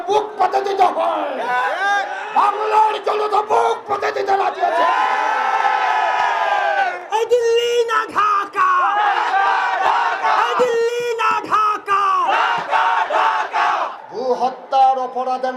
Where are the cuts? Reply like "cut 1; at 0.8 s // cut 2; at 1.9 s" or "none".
none